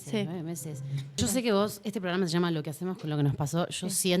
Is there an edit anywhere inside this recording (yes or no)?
yes